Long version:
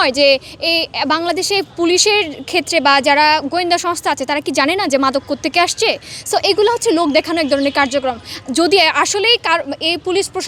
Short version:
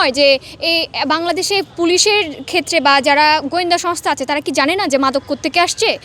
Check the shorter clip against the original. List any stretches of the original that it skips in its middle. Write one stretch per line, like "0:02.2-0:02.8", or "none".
none